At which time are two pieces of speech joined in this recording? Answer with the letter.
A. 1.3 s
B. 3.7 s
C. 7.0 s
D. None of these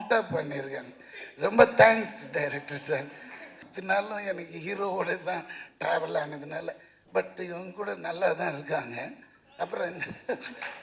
B